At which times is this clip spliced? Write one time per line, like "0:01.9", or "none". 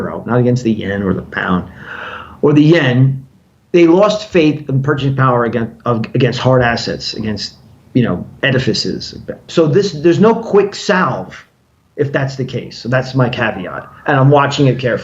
0:09.5